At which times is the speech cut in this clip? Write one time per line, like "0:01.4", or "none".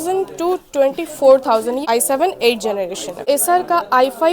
0:01.8
0:03.2